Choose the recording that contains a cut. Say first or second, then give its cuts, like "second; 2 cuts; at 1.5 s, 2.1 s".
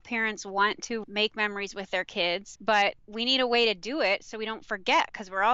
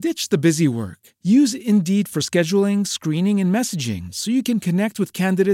first; 3 cuts; at 1.0 s, 2.5 s, 3.1 s